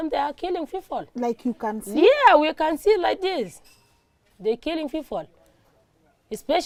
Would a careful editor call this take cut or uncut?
uncut